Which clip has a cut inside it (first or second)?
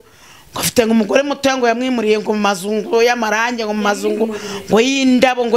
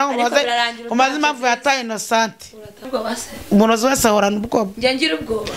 second